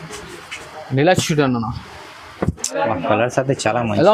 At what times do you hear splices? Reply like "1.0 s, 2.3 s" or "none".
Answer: none